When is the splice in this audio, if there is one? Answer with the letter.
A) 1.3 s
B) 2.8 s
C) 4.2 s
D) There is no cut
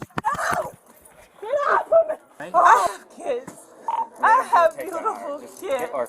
B